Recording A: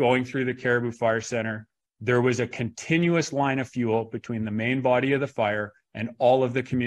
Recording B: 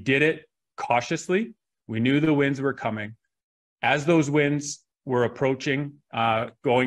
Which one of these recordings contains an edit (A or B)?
B